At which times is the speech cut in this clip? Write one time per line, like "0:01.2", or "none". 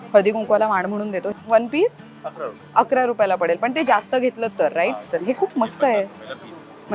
0:01.3
0:05.1